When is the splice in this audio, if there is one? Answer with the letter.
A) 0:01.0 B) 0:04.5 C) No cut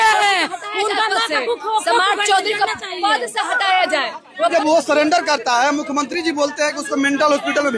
B